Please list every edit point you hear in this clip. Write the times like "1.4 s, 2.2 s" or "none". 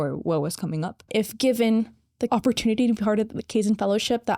1.1 s